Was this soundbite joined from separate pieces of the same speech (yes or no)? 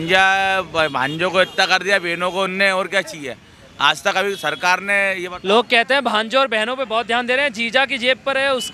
no